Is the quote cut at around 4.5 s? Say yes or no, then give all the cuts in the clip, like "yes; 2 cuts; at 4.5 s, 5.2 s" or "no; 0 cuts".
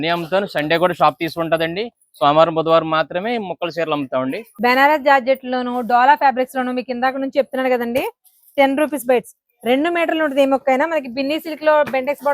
yes; 1 cut; at 4.5 s